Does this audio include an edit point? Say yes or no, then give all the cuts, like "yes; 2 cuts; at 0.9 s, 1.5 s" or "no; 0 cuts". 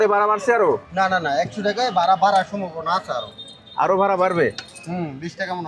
no; 0 cuts